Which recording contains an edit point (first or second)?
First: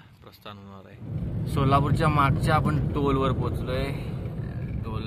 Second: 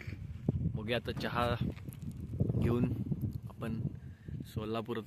first